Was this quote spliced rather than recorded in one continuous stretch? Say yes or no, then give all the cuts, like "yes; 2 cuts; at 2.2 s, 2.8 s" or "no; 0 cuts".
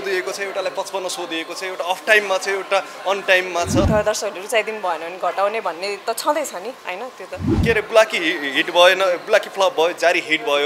yes; 2 cuts; at 3.9 s, 7.5 s